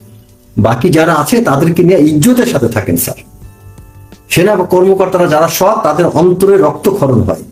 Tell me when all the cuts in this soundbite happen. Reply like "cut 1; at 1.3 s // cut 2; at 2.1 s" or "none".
none